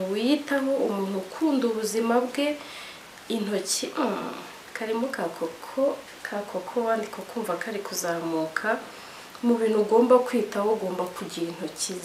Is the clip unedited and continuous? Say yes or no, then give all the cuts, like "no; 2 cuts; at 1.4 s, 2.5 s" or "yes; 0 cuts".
yes; 0 cuts